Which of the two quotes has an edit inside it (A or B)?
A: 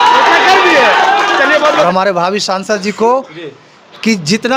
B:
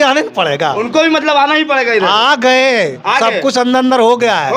A